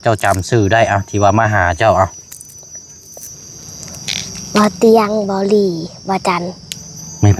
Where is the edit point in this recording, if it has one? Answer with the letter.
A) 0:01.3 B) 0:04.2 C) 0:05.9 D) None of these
D